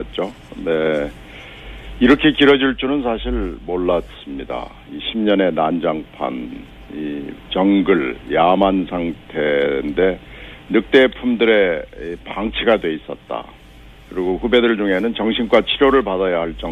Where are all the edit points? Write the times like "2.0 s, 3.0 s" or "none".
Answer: 13.9 s